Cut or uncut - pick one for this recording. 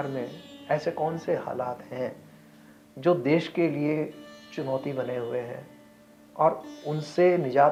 uncut